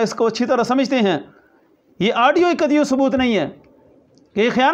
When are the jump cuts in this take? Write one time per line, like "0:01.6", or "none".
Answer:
none